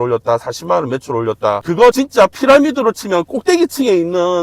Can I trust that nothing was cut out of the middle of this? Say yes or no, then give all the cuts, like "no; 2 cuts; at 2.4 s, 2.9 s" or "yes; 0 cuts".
no; 1 cut; at 1.8 s